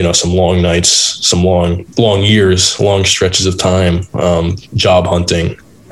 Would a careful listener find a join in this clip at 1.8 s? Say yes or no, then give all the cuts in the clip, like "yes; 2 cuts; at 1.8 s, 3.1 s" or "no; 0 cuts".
yes; 1 cut; at 1.8 s